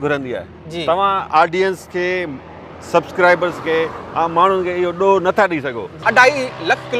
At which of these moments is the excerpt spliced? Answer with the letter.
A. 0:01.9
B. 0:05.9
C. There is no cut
B